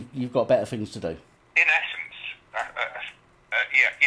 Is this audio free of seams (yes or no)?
yes